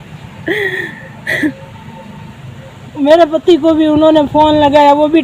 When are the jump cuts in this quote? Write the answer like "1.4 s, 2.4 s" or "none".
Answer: 2.9 s